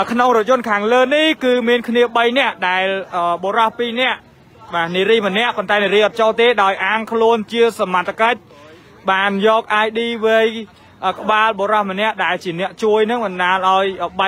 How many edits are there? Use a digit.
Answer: 0